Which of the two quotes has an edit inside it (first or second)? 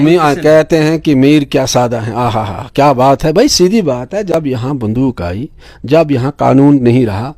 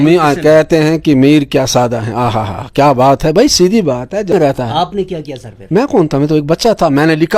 second